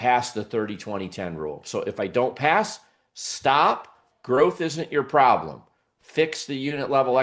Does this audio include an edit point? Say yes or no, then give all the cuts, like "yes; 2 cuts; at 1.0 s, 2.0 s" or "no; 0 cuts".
no; 0 cuts